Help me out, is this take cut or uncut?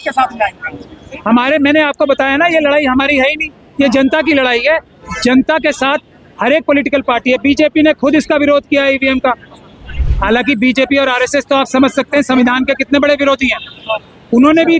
uncut